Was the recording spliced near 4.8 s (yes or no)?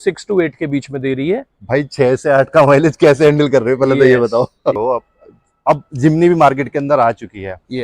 yes